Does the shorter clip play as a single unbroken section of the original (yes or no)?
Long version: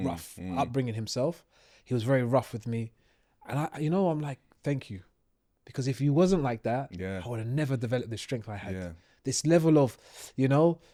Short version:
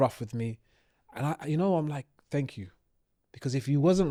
yes